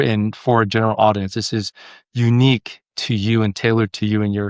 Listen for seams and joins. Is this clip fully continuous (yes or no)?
yes